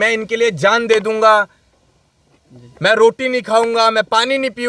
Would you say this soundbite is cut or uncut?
uncut